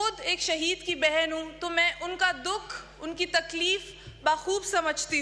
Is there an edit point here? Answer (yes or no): no